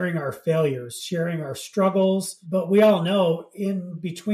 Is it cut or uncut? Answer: cut